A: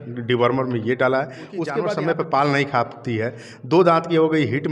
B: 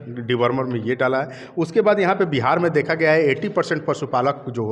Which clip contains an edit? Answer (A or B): A